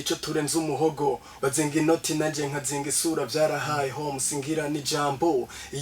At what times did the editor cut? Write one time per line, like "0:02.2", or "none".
0:01.3